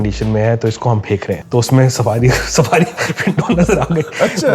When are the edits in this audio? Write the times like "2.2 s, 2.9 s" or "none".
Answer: 1.4 s

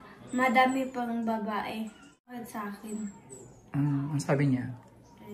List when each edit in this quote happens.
2.4 s

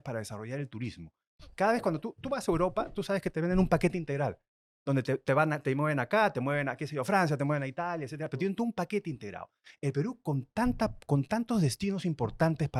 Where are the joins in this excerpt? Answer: none

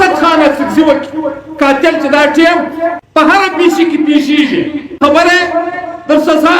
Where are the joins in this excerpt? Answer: 3.0 s, 4.8 s

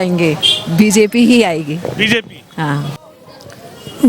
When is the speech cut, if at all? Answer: 2.9 s

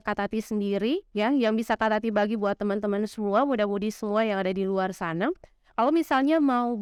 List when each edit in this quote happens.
none

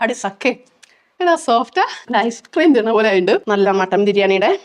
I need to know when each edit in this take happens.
3.3 s

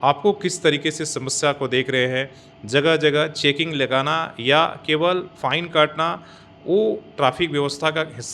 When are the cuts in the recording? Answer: none

